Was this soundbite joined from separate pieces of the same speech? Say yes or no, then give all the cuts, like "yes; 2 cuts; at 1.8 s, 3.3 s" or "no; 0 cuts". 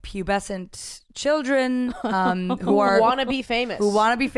no; 0 cuts